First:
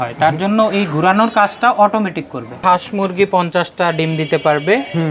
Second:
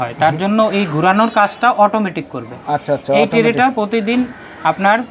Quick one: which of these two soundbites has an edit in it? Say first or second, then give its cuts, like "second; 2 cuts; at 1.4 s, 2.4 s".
first; 1 cut; at 2.6 s